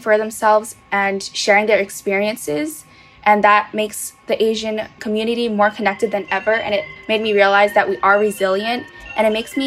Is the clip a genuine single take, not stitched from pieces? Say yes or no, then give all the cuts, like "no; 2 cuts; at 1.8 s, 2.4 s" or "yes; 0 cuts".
yes; 0 cuts